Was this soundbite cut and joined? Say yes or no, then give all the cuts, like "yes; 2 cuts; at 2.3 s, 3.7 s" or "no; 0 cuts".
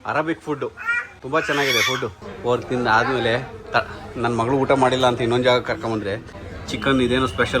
yes; 1 cut; at 2.3 s